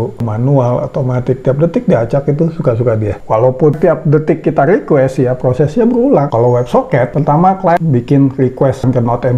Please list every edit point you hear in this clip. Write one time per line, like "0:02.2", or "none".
0:03.2